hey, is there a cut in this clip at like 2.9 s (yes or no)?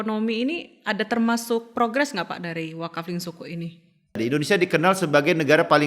no